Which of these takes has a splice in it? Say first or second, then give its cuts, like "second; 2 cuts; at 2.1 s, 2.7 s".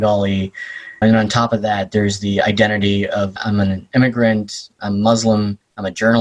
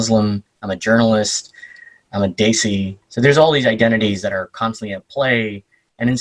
second; 1 cut; at 3.0 s